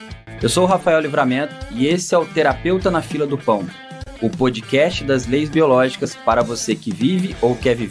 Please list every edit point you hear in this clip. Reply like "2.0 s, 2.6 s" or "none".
none